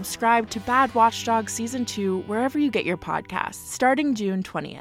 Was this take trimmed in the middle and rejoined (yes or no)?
yes